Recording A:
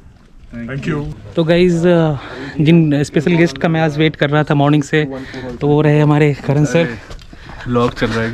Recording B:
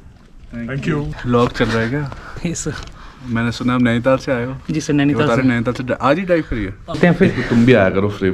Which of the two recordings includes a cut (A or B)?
B